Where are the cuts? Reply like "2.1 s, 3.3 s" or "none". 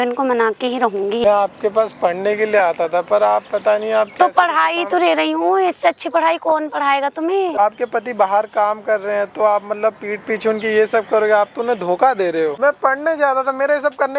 1.2 s, 7.5 s, 12.6 s